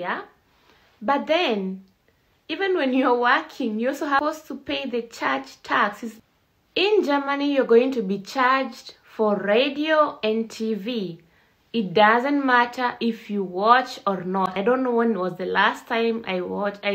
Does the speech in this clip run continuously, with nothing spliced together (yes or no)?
no